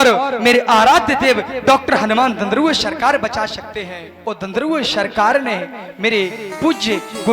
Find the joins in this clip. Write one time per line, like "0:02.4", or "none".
0:04.2